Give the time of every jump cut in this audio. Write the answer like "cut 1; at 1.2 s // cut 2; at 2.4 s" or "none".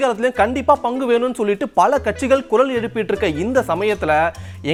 none